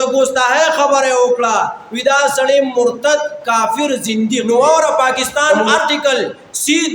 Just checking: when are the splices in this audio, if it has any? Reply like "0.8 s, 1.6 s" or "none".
4.4 s, 5.2 s